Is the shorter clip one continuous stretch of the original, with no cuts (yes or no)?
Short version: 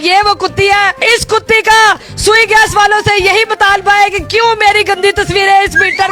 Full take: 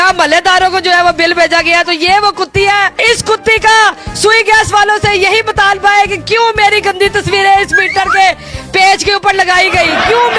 yes